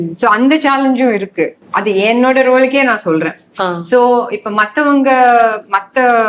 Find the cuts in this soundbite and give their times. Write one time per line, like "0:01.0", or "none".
0:01.6